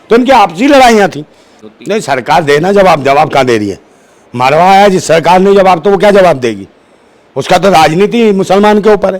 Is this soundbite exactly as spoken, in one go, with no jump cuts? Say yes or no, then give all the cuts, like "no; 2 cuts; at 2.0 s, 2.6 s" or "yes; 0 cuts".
no; 1 cut; at 1.6 s